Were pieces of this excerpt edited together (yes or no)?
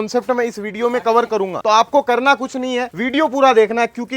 yes